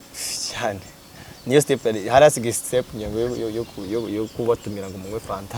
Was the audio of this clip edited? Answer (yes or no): no